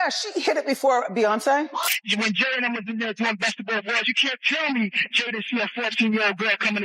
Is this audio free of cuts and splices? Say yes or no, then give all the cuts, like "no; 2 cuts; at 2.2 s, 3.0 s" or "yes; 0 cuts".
no; 1 cut; at 1.7 s